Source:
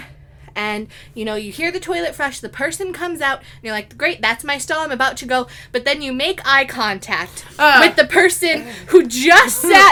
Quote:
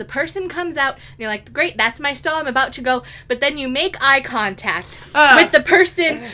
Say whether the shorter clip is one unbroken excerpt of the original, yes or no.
yes